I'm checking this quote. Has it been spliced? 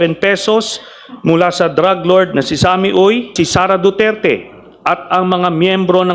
yes; 1 cut; at 3.3 s

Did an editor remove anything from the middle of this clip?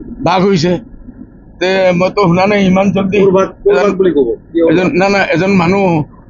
no; 0 cuts

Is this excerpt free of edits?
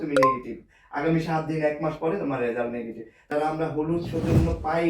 no; 1 cut; at 3.3 s

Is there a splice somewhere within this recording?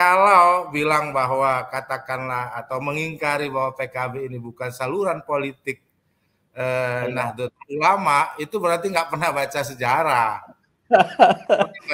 no; 0 cuts

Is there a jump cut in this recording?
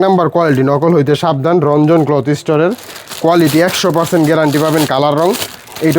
no; 0 cuts

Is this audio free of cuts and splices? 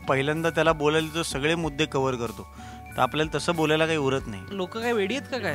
no; 1 cut; at 4.5 s

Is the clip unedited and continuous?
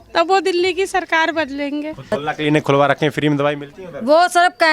no; 1 cut; at 2.1 s

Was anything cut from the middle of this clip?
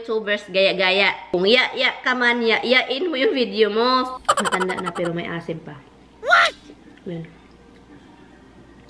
yes; 2 cuts; at 1.3 s, 4.2 s

